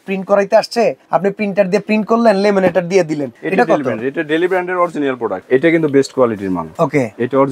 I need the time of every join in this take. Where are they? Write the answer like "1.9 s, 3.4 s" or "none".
1.0 s, 3.3 s, 5.4 s, 6.7 s